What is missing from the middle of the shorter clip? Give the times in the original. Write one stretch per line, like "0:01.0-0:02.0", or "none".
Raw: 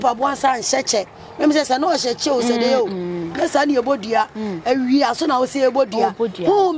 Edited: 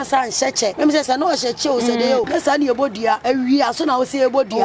0:01.1-0:01.4
0:02.9-0:03.4
0:04.3-0:04.6